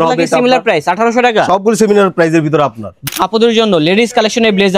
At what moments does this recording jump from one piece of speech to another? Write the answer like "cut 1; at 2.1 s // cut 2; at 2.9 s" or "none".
cut 1; at 3.0 s